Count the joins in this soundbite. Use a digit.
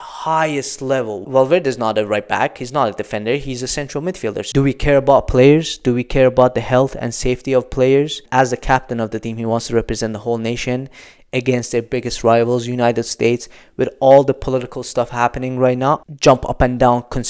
4